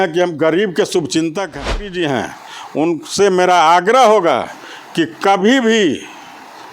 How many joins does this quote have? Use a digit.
1